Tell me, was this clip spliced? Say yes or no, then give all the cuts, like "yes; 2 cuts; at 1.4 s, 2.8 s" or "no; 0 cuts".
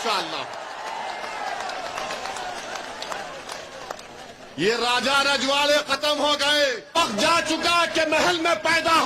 yes; 1 cut; at 7.0 s